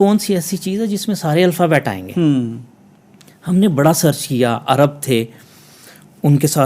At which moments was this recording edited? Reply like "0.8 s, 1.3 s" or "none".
none